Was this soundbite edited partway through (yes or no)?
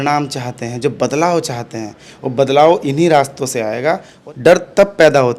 yes